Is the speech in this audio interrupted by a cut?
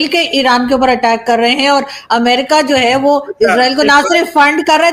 no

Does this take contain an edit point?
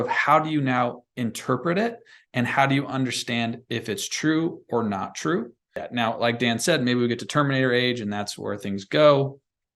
yes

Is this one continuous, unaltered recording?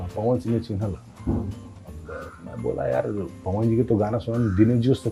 yes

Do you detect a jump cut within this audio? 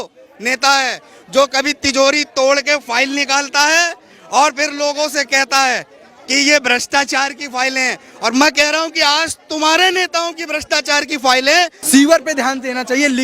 yes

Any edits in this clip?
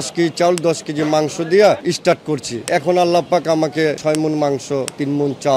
no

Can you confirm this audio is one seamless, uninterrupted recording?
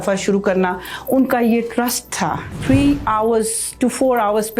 no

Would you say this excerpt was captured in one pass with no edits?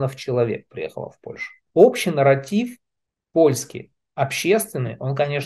no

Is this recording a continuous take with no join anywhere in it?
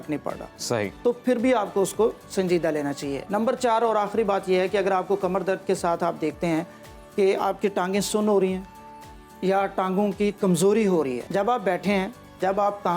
no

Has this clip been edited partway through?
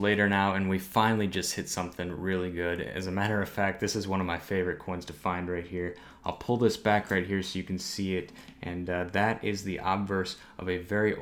no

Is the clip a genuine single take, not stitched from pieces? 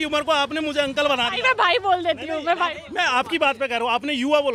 yes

